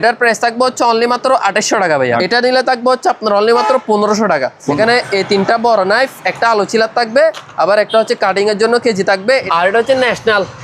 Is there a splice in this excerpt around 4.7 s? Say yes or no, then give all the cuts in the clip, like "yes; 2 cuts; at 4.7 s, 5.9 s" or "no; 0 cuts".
yes; 3 cuts; at 2.2 s, 4.7 s, 9.5 s